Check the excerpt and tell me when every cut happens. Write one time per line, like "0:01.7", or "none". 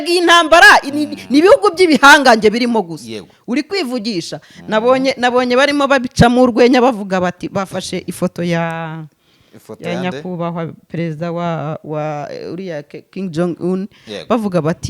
none